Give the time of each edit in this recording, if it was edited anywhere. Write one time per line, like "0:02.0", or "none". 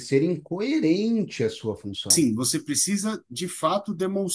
0:02.1